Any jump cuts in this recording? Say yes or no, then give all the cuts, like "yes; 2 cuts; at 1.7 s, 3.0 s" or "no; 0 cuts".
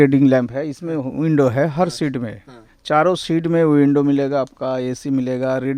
no; 0 cuts